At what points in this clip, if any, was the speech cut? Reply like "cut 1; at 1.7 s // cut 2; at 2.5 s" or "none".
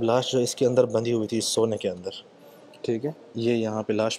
none